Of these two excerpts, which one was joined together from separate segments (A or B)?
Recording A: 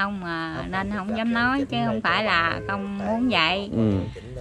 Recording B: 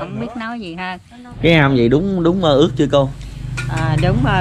B